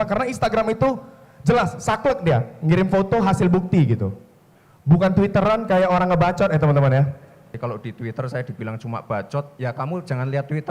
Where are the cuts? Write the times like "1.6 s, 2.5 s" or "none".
7.5 s